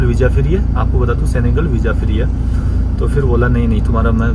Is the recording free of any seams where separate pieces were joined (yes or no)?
yes